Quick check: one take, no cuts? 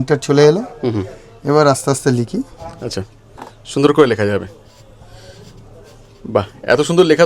yes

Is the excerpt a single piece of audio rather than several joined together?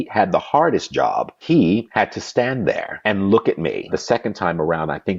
no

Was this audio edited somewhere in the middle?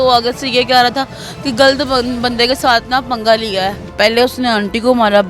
yes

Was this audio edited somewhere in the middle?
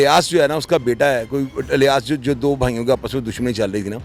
no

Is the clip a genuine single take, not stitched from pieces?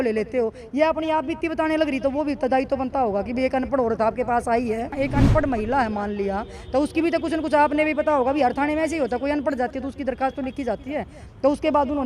no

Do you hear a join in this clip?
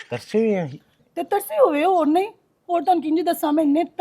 yes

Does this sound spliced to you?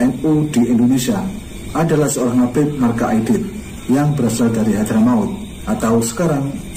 no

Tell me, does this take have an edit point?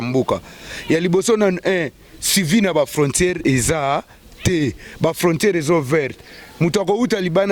no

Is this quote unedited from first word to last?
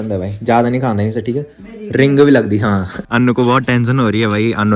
no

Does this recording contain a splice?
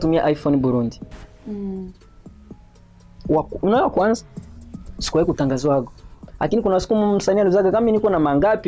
no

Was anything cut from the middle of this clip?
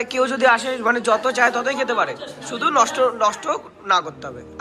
no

